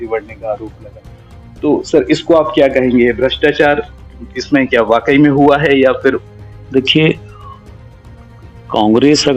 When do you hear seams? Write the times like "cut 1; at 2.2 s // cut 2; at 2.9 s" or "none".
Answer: none

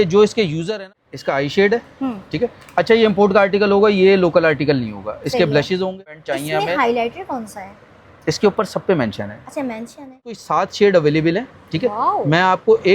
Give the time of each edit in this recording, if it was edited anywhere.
cut 1; at 0.9 s // cut 2; at 6.3 s // cut 3; at 10.4 s

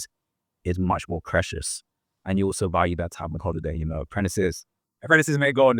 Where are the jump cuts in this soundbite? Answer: none

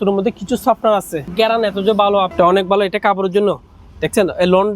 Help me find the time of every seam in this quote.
cut 1; at 1.3 s // cut 2; at 2.3 s

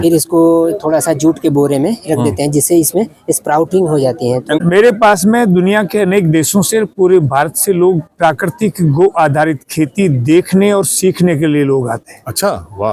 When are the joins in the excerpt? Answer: cut 1; at 4.6 s

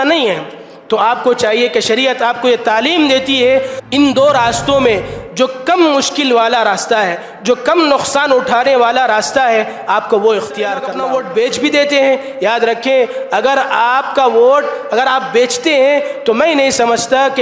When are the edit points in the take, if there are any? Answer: cut 1; at 3.8 s // cut 2; at 10.9 s

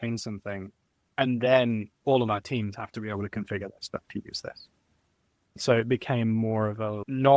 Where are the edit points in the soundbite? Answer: cut 1; at 1.9 s

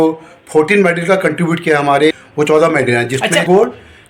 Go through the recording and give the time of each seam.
cut 1; at 2.2 s

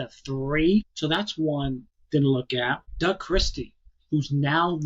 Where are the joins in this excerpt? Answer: cut 1; at 0.9 s

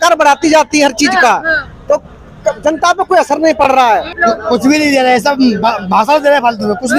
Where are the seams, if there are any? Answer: cut 1; at 4.1 s

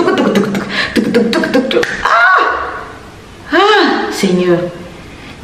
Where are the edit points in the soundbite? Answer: cut 1; at 2.0 s

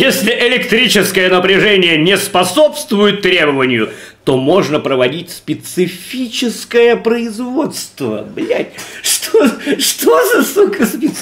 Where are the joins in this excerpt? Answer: none

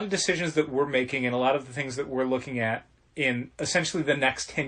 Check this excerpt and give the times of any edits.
cut 1; at 3.5 s

